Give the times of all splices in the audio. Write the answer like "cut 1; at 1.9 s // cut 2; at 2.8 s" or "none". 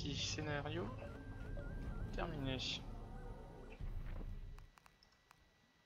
none